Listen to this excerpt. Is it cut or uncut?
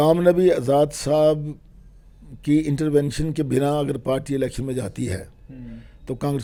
uncut